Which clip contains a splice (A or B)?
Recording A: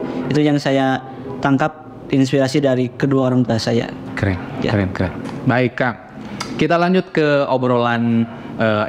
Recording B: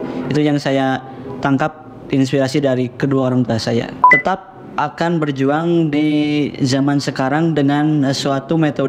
B